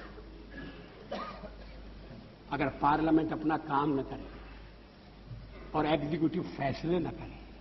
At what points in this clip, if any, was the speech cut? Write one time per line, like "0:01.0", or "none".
0:06.4